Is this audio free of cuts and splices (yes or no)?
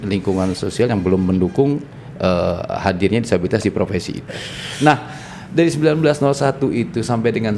no